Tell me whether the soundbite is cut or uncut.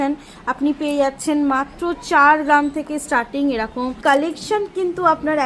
cut